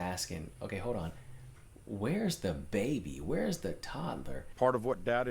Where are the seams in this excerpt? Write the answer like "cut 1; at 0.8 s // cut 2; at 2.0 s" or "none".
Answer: cut 1; at 4.4 s